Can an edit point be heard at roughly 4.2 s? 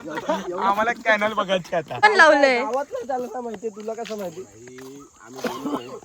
no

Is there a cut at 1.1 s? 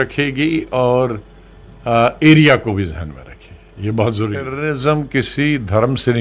no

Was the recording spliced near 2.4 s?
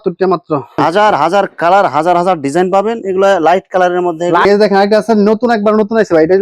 no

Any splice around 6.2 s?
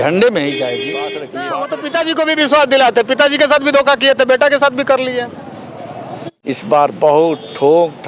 yes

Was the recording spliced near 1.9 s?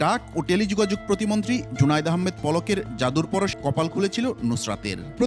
no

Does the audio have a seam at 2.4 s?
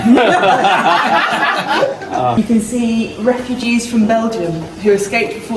yes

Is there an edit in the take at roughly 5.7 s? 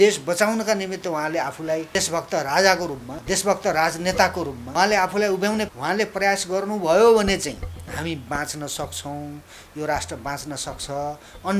yes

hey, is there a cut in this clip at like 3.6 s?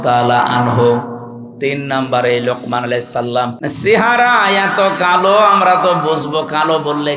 yes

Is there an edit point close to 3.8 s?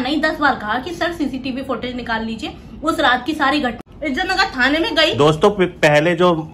yes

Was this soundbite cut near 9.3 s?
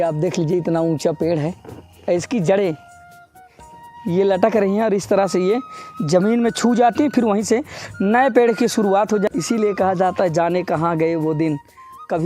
yes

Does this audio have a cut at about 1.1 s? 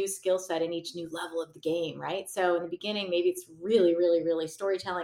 no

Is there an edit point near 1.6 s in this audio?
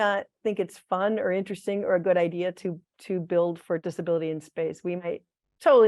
no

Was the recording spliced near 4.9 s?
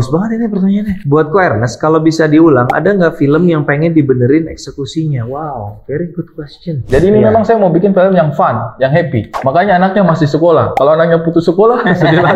no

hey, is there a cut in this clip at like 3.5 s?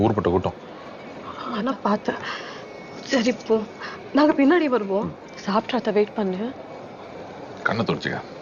yes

